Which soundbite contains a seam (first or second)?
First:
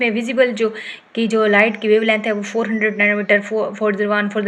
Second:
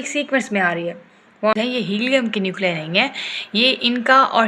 second